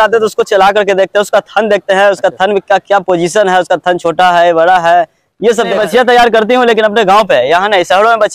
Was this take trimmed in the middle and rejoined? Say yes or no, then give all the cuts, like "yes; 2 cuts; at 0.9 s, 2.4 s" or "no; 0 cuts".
yes; 1 cut; at 5.7 s